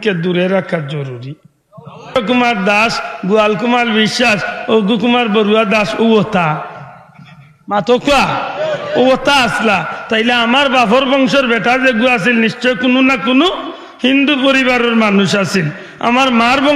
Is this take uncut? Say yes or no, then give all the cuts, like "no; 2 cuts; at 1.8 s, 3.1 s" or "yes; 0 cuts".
no; 1 cut; at 2.1 s